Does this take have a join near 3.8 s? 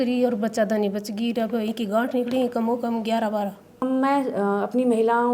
yes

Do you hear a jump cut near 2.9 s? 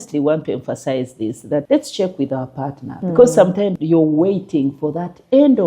yes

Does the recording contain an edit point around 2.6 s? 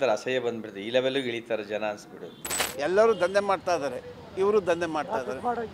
yes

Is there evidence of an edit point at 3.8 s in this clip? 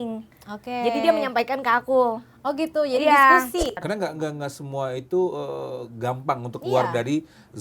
yes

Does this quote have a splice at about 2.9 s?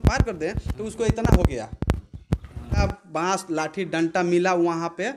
yes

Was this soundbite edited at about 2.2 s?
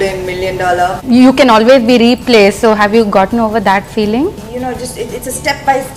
no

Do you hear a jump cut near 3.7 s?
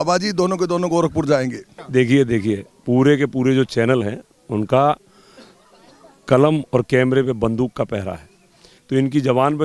no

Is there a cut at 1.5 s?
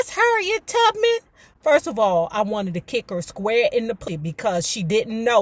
no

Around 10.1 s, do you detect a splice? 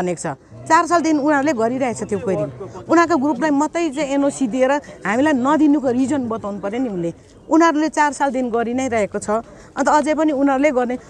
no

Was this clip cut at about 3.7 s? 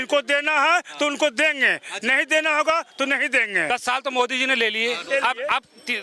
yes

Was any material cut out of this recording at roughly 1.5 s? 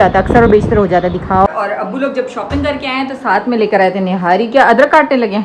yes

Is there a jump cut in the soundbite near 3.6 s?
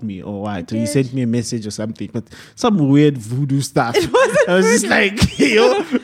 no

